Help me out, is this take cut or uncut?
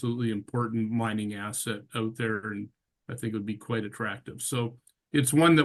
uncut